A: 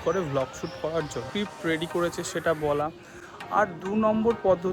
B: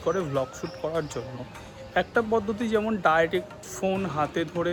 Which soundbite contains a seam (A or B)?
A